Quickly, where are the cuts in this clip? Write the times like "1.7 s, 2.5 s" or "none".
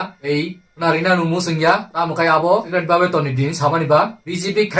2.7 s

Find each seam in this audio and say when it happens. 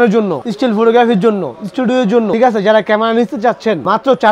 none

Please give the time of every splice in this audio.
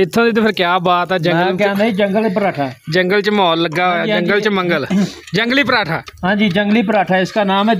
none

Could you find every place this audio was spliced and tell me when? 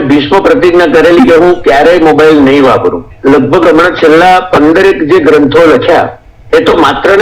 3.1 s

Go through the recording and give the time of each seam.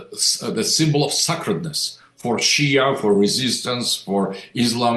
none

